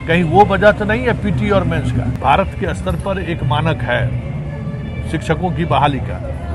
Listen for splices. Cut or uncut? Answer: cut